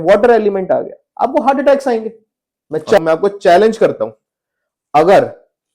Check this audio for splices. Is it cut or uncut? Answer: cut